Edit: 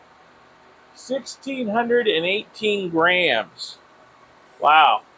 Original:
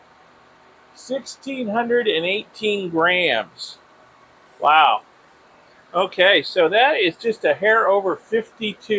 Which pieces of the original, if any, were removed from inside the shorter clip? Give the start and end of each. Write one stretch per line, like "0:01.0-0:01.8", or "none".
none

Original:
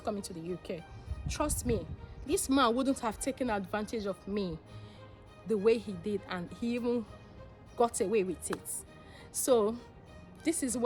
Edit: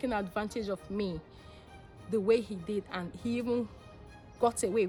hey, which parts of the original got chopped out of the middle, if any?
none

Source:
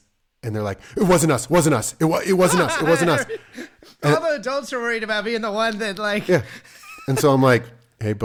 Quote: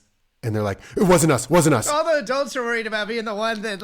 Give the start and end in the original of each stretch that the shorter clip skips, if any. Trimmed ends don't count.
0:02.0-0:04.2

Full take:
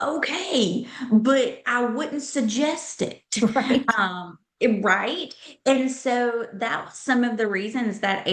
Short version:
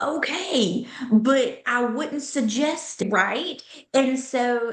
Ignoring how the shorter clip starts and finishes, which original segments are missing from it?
0:03.0-0:04.8

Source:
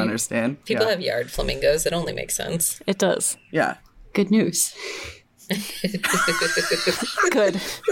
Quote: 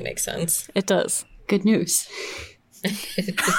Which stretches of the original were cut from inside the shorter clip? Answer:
0:03.4-0:03.9

